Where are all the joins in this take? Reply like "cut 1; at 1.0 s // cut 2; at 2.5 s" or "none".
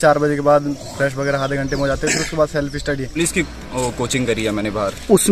cut 1; at 3.2 s

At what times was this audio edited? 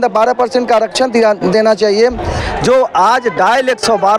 cut 1; at 2.4 s

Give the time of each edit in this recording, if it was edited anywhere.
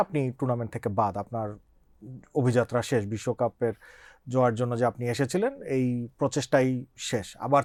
none

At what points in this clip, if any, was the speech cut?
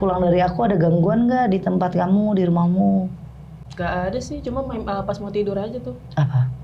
cut 1; at 3.6 s

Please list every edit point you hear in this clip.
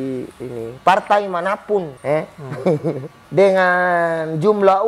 cut 1; at 1.9 s // cut 2; at 3.1 s

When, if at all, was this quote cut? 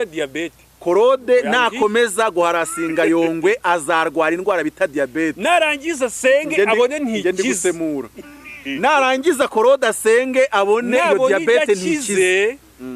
none

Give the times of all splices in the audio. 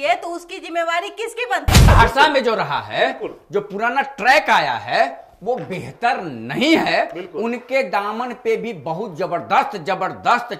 cut 1; at 1.9 s

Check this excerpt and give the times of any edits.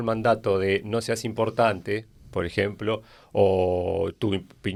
none

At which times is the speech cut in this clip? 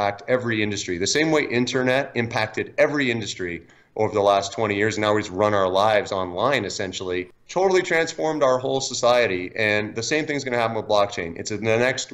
cut 1; at 7.4 s

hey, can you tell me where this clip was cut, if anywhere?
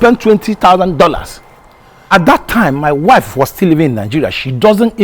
cut 1; at 2.1 s

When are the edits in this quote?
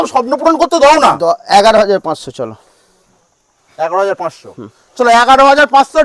none

